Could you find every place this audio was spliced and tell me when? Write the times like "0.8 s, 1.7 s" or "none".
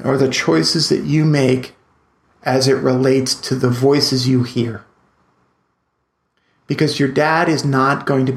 3.4 s